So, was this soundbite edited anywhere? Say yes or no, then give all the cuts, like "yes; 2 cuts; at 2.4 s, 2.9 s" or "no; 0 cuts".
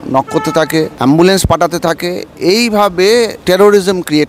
yes; 2 cuts; at 0.9 s, 3.4 s